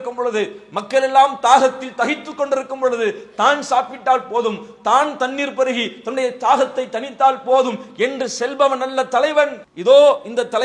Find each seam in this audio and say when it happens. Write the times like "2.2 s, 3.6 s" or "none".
9.7 s